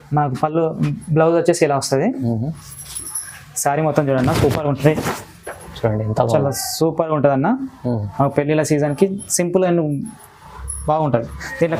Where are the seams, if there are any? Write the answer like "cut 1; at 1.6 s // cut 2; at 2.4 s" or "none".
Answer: none